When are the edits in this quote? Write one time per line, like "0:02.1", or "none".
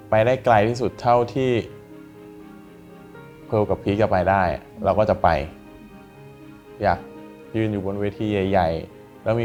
none